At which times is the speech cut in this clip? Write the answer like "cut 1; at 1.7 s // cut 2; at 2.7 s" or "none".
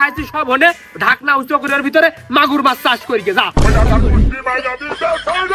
none

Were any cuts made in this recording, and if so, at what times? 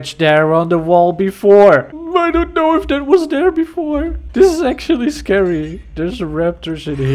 cut 1; at 2.0 s // cut 2; at 4.2 s

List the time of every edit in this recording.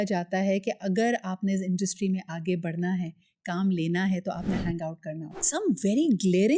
cut 1; at 5.4 s

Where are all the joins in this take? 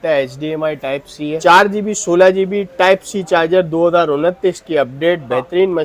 cut 1; at 1.4 s

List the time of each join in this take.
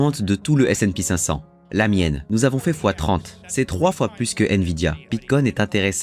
cut 1; at 2.2 s // cut 2; at 3.4 s // cut 3; at 5.0 s

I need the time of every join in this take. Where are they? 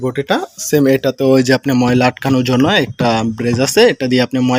none

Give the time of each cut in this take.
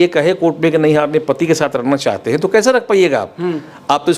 none

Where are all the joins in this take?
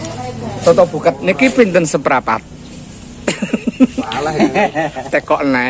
cut 1; at 1.3 s

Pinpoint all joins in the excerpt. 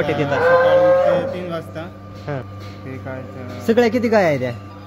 cut 1; at 2.5 s

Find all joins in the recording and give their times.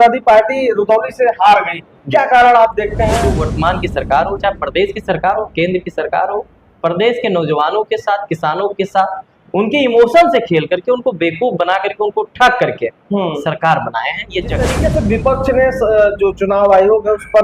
cut 1; at 3.3 s // cut 2; at 14.7 s

